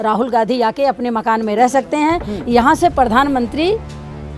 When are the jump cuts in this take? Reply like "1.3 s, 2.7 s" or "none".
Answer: none